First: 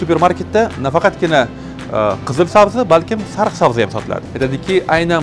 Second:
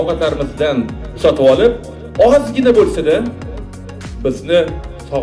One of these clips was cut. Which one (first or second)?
first